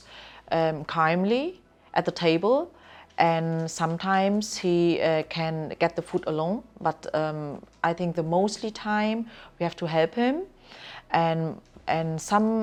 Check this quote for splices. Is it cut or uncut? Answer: uncut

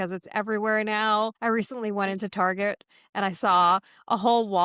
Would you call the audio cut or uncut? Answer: cut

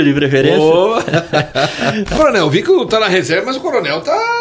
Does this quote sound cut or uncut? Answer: cut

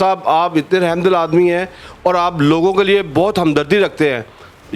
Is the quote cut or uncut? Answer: uncut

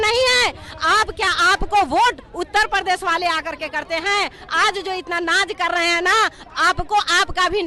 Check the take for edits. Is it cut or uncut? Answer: uncut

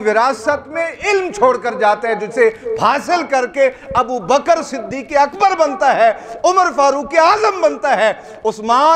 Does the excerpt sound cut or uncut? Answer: uncut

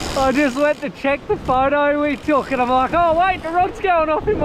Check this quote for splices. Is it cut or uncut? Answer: uncut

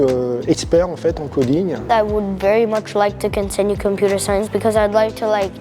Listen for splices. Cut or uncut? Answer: cut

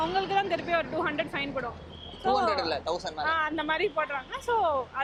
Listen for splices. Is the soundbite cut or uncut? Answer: uncut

